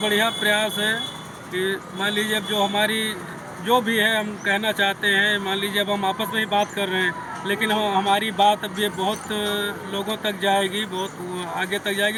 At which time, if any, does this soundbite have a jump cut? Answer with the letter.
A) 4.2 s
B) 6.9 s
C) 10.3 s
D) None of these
D